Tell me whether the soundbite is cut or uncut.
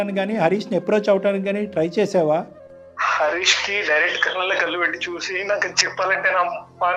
uncut